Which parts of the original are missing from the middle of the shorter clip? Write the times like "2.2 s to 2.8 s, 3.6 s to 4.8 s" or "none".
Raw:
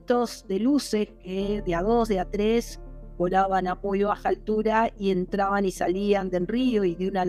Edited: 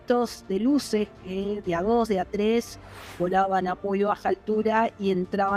none